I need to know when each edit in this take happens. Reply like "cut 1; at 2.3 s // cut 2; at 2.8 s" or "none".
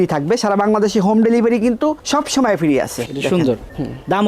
cut 1; at 3.0 s